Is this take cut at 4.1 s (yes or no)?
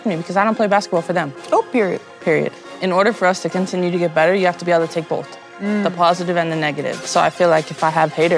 no